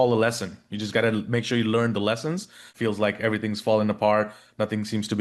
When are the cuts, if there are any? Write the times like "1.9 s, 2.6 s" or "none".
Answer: 2.7 s